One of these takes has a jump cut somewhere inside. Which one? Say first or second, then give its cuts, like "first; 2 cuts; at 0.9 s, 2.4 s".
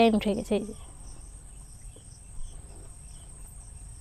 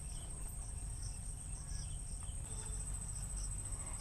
second; 1 cut; at 2.5 s